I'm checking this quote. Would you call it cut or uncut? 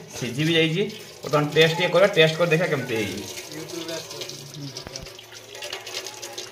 uncut